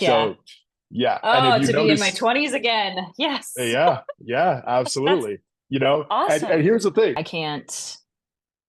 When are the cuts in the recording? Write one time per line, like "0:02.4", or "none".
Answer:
0:07.1